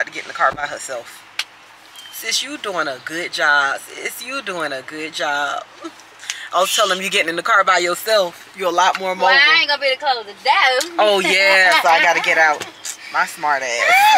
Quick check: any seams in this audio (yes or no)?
no